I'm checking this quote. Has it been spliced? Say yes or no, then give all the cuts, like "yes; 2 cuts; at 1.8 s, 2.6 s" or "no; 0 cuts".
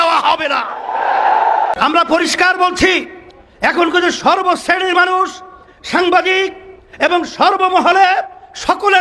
yes; 1 cut; at 1.7 s